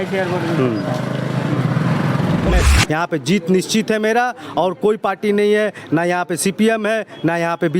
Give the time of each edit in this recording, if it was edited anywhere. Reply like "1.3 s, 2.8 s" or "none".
2.5 s